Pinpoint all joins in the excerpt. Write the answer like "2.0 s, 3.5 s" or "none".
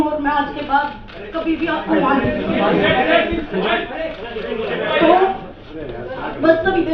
none